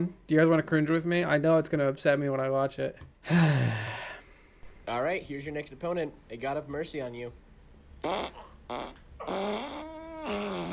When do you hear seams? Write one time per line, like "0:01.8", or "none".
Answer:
0:03.1